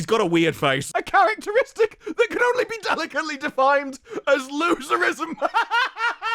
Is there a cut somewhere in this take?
no; 0 cuts

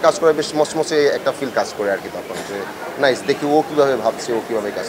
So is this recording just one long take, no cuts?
yes; 0 cuts

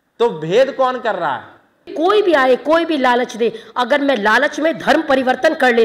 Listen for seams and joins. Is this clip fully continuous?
no; 1 cut; at 1.9 s

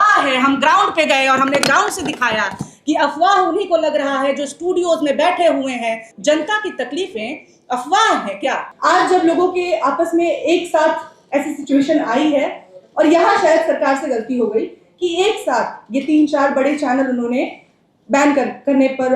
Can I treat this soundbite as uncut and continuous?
no; 2 cuts; at 6.1 s, 8.7 s

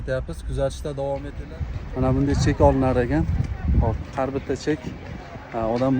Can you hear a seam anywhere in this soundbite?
yes; 1 cut; at 1.3 s

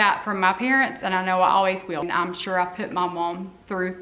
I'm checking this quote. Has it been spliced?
yes; 1 cut; at 2.1 s

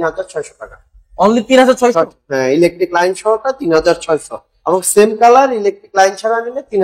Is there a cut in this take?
no; 0 cuts

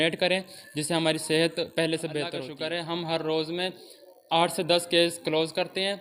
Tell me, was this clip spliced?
yes; 1 cut; at 2.4 s

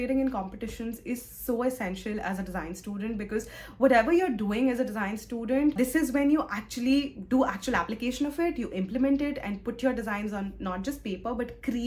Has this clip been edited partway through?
no; 0 cuts

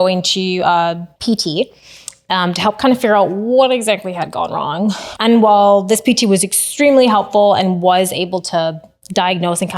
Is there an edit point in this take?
yes; 2 cuts; at 1.1 s, 5.1 s

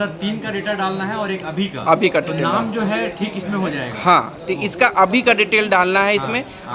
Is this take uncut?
yes; 0 cuts

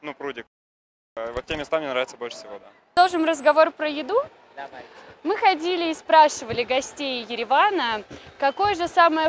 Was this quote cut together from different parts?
no; 0 cuts

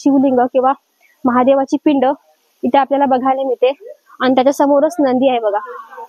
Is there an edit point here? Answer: no; 0 cuts

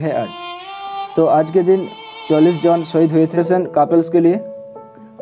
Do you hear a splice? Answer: yes; 1 cut; at 3.4 s

